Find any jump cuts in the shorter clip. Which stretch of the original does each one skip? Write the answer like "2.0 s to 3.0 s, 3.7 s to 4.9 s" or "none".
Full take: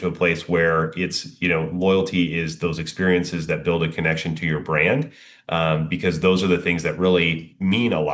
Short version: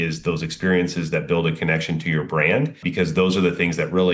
5.2 s to 5.9 s